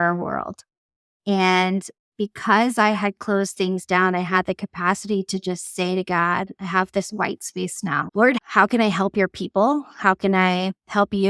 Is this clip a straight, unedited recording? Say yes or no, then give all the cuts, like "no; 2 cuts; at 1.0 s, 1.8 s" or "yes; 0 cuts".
no; 1 cut; at 8.4 s